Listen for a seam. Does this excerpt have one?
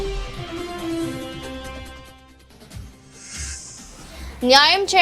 yes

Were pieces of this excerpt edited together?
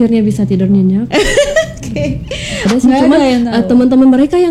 yes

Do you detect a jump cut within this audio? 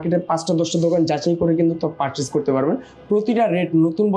no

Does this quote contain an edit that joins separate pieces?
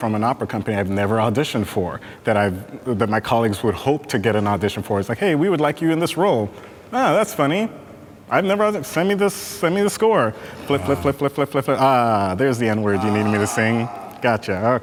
no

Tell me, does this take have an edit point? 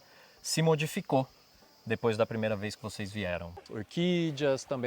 yes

